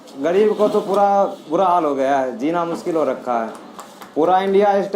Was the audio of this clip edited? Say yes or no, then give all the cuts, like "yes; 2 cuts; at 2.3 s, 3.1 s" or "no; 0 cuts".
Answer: no; 0 cuts